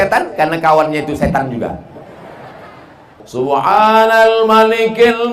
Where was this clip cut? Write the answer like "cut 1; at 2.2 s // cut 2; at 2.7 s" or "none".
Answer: cut 1; at 3.2 s